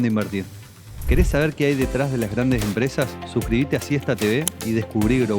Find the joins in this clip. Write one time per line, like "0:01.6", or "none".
0:01.0